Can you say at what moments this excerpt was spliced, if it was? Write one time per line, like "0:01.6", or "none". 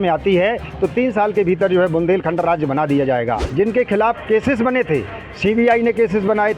0:03.4